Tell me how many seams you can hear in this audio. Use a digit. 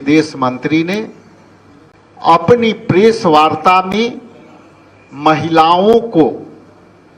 0